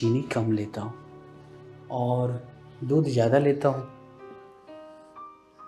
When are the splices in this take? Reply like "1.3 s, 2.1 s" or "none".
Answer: none